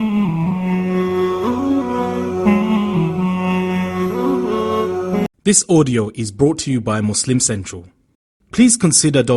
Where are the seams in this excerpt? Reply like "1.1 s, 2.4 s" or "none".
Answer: 5.2 s